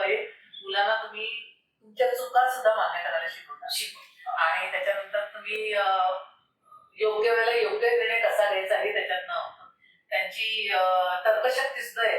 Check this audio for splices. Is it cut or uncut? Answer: uncut